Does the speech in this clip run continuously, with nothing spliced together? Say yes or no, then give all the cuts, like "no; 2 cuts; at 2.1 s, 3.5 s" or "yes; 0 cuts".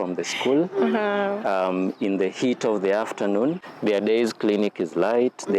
no; 1 cut; at 3.6 s